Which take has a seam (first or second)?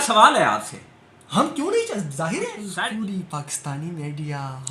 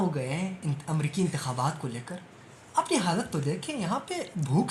first